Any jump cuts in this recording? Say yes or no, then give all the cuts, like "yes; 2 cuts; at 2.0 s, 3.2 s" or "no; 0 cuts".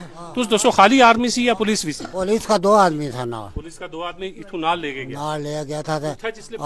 no; 0 cuts